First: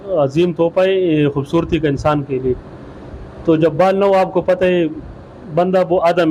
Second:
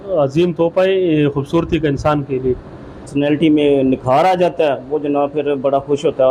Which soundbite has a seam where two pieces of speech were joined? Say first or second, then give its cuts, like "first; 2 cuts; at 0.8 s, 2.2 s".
second; 1 cut; at 3.1 s